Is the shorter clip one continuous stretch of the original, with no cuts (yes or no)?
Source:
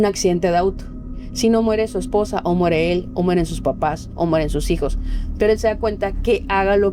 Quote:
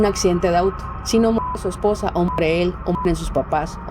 no